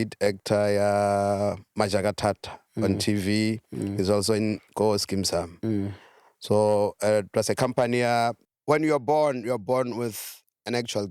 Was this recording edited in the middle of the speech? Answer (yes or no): yes